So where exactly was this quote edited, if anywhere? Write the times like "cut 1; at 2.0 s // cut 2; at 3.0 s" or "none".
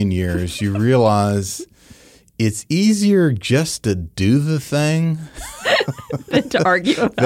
none